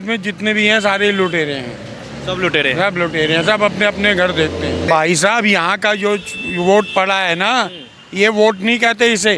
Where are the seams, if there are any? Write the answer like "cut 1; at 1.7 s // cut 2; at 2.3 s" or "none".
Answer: cut 1; at 4.9 s